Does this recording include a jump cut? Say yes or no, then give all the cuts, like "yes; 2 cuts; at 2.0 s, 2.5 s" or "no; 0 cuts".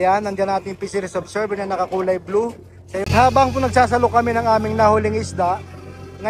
yes; 1 cut; at 3.1 s